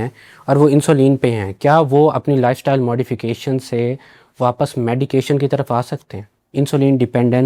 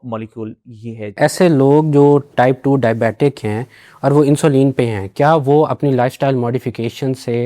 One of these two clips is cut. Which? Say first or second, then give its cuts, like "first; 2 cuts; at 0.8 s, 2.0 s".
second; 2 cuts; at 1.2 s, 2.3 s